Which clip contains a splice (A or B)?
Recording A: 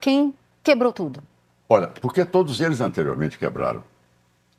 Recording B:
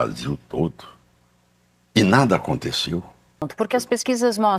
B